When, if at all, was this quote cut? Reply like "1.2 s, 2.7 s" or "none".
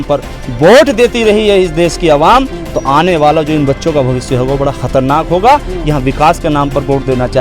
none